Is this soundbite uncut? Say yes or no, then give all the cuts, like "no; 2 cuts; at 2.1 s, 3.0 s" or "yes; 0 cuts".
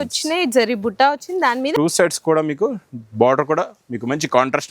no; 1 cut; at 1.7 s